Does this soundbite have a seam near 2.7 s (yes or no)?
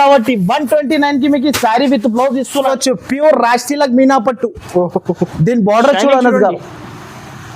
yes